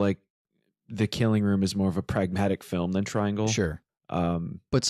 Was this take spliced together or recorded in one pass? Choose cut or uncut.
uncut